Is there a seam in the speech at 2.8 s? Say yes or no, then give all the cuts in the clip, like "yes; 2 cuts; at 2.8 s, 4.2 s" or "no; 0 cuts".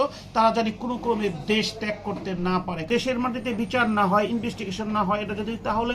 yes; 1 cut; at 2.8 s